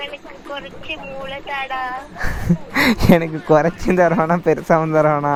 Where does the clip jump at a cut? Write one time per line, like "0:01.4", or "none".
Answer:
none